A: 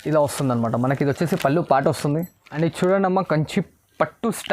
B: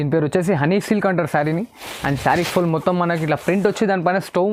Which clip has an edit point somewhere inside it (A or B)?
A